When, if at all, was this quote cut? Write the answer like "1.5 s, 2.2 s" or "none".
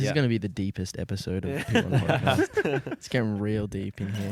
none